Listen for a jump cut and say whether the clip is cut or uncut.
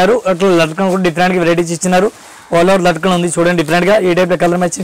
uncut